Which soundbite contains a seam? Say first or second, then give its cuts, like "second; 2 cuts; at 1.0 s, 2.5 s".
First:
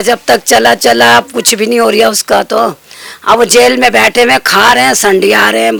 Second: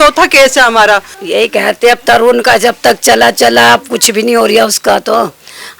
second; 1 cut; at 1.1 s